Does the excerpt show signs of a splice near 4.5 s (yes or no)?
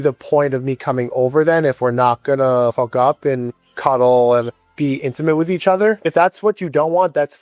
yes